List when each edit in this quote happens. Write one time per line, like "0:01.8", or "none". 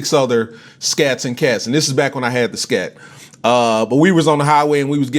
0:01.3